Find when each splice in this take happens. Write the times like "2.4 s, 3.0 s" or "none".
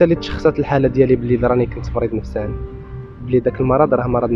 none